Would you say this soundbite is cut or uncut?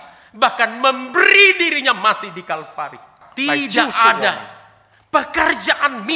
cut